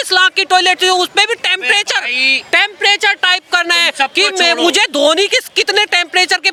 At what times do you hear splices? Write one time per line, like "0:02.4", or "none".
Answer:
none